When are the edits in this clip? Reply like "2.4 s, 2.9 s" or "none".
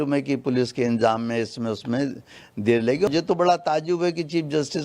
3.1 s